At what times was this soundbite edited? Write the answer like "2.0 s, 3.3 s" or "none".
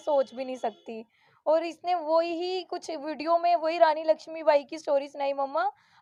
none